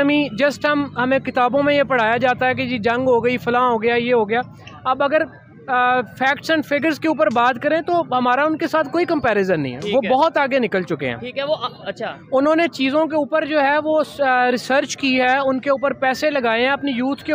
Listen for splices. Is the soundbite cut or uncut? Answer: uncut